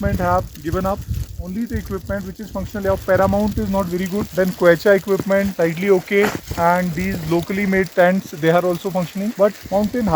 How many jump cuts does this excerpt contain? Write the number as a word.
zero